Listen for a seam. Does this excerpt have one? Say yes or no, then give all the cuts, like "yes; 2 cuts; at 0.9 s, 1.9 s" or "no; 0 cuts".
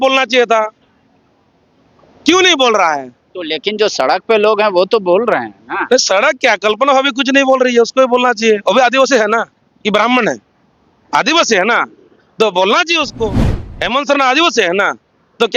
no; 0 cuts